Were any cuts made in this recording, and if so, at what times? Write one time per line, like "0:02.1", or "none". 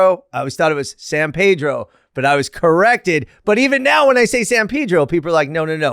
none

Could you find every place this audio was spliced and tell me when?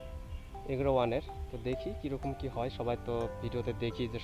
none

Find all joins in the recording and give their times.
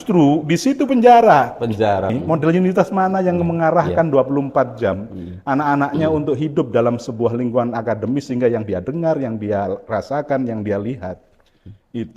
0:02.2

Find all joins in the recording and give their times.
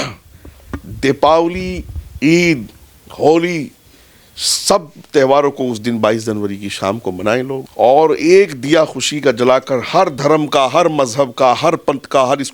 0:07.7

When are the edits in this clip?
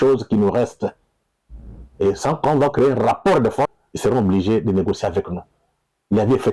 0:03.8

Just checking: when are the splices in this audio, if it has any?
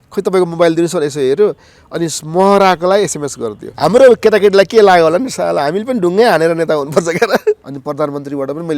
0:03.6
0:07.6

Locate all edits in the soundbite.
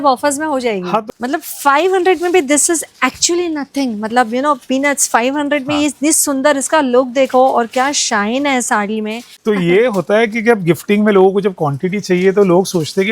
0:01.1
0:09.3

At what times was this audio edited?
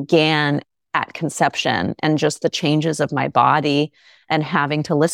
none

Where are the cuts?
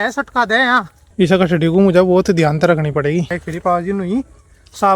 0:01.0
0:03.4

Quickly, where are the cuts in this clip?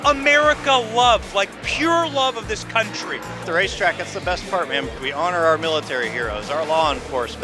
0:03.4
0:04.9

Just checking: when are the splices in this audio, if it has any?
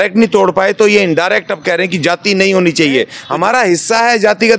0:03.2

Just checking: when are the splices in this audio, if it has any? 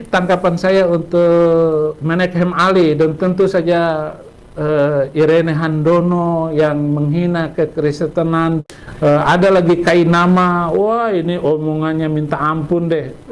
0:08.6

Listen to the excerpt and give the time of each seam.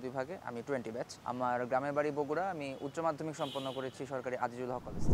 none

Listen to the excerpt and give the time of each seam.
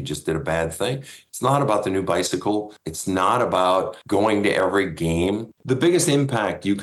0:01.2
0:05.6

